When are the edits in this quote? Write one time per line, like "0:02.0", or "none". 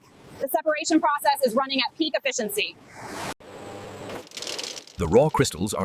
0:03.4